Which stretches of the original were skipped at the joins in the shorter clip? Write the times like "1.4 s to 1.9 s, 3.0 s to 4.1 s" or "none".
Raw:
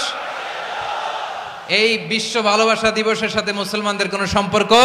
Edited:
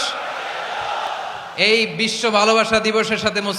1.1 s to 1.2 s